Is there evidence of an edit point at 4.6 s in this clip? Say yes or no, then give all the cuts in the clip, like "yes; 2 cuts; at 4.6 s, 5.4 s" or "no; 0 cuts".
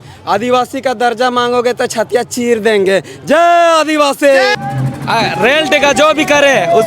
yes; 1 cut; at 4.6 s